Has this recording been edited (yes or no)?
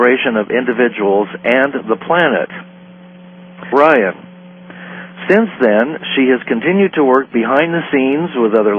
no